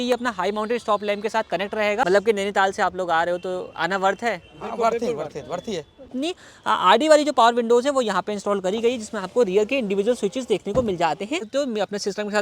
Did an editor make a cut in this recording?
yes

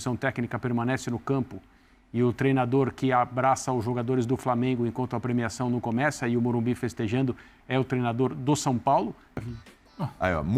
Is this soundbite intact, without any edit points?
no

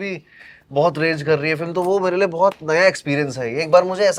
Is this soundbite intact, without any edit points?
yes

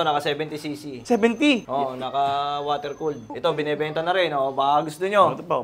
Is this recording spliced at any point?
yes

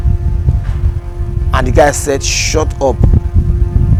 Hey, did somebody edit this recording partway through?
no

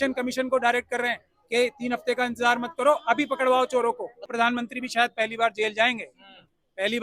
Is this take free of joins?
no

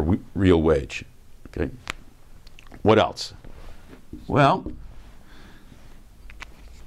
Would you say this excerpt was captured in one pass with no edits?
no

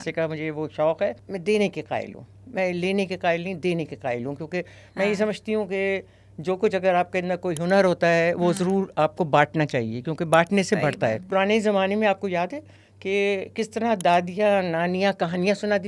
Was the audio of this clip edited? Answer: yes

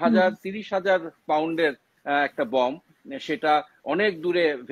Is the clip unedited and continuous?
yes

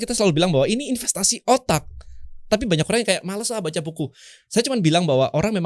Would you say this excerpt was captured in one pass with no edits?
yes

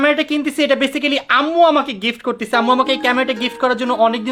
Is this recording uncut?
yes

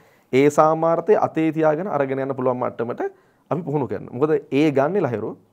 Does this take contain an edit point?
no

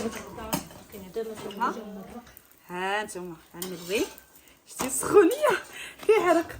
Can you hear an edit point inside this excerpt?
yes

